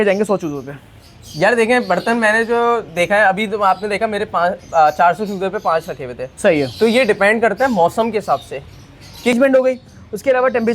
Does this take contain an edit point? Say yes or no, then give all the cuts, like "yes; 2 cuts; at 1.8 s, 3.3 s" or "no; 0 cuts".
yes; 1 cut; at 9.3 s